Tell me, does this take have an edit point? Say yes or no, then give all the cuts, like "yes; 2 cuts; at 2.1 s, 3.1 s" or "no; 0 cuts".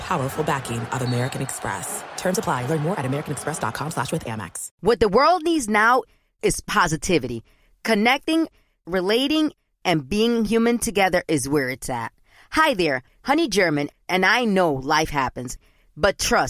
yes; 1 cut; at 4.7 s